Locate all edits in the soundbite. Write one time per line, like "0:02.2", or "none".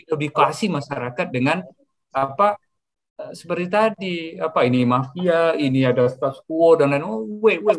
none